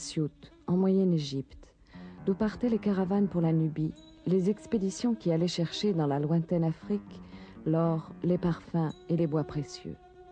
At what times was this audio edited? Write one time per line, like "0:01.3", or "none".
0:02.2